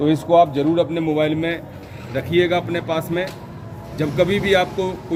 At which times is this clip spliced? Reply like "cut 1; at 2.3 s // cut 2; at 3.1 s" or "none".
none